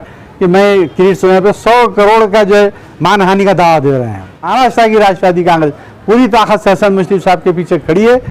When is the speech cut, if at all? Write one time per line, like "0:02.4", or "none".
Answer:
0:04.5